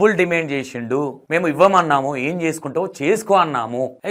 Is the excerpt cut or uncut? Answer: uncut